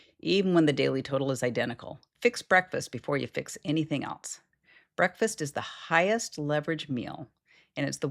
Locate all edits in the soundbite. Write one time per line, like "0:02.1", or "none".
0:02.0